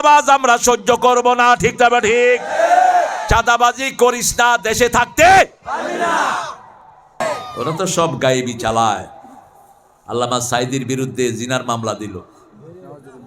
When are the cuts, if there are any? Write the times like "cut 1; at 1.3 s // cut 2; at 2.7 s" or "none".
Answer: cut 1; at 7.2 s